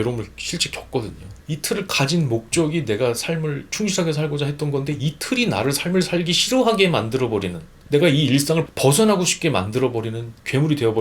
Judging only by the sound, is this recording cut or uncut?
cut